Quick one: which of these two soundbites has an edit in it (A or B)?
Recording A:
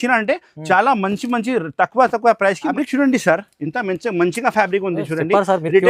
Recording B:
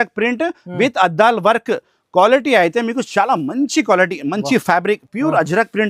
A